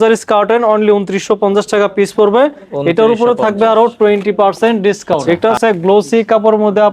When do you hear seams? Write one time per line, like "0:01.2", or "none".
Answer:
0:05.4

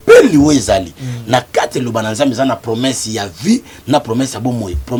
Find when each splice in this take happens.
none

